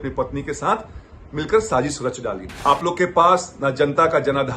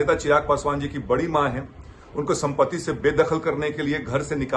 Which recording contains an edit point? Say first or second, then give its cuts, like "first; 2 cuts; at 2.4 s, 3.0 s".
first; 1 cut; at 2.5 s